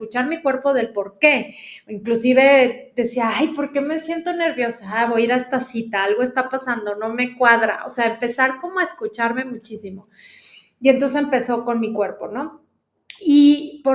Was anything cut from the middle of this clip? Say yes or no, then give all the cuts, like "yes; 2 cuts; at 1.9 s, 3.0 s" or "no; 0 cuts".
no; 0 cuts